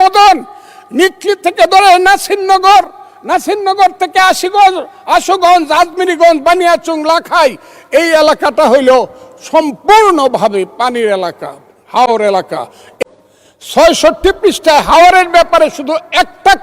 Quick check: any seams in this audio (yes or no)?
yes